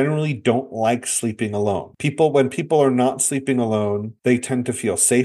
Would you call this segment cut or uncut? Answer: uncut